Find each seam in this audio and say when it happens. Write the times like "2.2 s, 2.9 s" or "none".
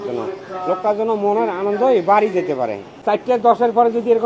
2.9 s